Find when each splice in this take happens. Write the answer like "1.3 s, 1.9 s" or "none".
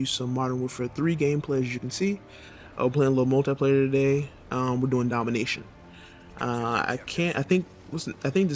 4.7 s